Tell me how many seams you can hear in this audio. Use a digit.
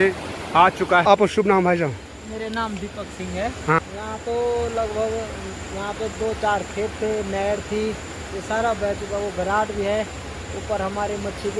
2